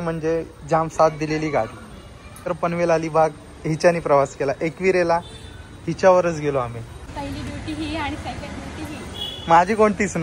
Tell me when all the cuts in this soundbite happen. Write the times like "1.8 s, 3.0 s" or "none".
2.5 s, 7.1 s